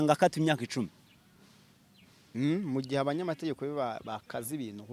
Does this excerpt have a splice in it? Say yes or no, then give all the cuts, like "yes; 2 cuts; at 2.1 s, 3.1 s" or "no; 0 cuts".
no; 0 cuts